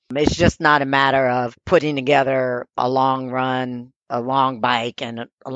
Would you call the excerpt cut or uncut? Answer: cut